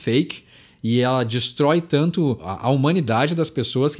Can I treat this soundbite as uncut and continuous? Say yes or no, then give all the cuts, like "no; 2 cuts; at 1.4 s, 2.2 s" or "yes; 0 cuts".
no; 1 cut; at 2.5 s